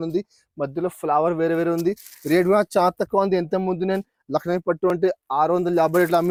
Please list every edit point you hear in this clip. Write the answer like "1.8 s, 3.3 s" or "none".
none